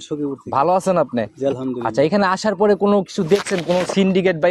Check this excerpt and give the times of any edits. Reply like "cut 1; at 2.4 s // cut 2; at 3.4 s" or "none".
none